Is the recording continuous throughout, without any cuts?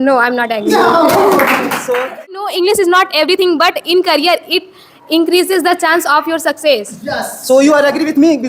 no; 1 cut; at 2.4 s

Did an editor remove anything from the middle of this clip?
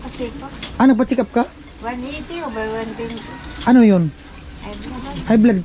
no; 0 cuts

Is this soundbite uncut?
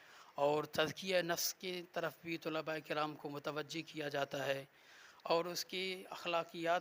yes; 0 cuts

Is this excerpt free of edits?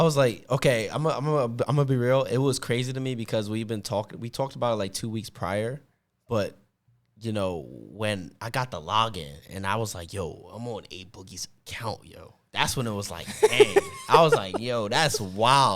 yes; 0 cuts

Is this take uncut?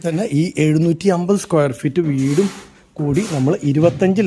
yes; 0 cuts

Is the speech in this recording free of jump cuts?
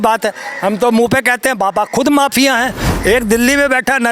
no; 1 cut; at 2.8 s

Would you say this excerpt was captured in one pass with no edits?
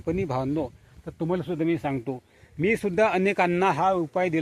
yes; 0 cuts

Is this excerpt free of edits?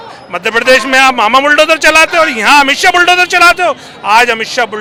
yes; 0 cuts

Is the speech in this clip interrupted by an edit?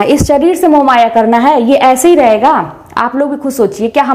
no; 0 cuts

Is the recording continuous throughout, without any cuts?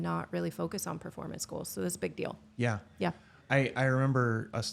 yes; 0 cuts

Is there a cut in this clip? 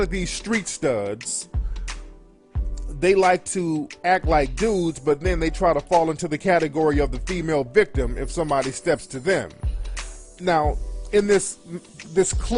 yes; 1 cut; at 7.3 s

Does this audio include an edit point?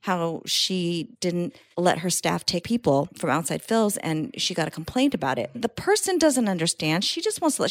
yes; 3 cuts; at 1.4 s, 2.6 s, 5.7 s

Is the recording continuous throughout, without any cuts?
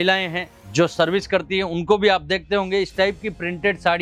yes; 0 cuts

